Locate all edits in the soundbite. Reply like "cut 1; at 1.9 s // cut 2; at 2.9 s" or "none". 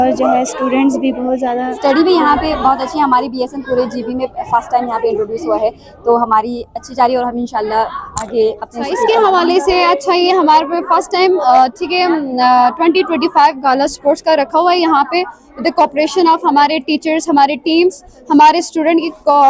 cut 1; at 1.8 s // cut 2; at 9.0 s